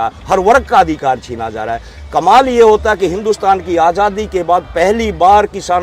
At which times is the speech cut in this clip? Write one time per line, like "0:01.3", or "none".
none